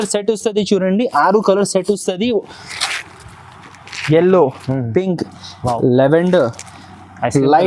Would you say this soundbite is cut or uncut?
uncut